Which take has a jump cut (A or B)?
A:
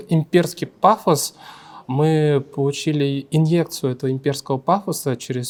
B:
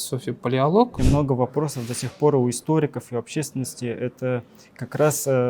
B